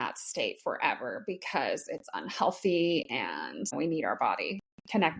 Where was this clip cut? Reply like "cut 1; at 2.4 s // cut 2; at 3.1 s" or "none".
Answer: cut 1; at 3.7 s